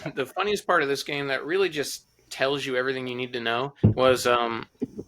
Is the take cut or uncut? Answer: cut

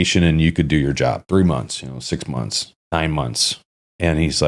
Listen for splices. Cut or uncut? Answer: cut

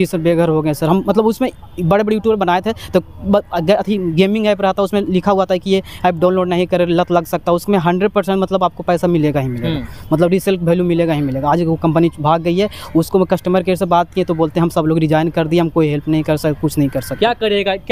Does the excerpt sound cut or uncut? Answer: uncut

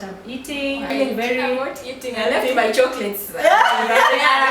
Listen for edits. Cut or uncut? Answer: cut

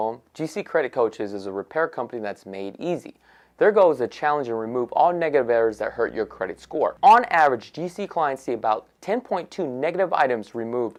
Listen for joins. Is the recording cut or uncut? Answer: uncut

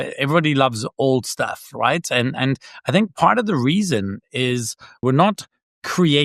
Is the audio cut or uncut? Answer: cut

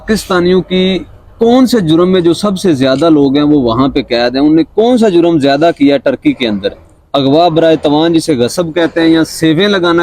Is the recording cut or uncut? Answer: uncut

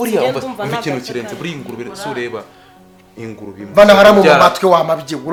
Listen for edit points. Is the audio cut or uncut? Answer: uncut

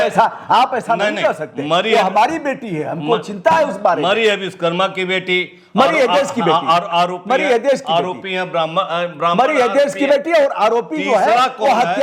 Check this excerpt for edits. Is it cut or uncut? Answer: uncut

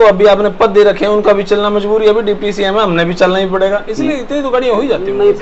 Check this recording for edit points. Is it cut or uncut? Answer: uncut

